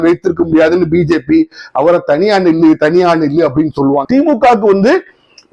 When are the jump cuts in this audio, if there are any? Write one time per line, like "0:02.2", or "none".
0:04.0